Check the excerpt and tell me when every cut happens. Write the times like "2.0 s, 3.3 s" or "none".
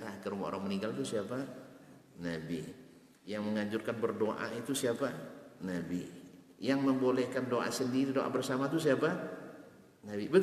3.2 s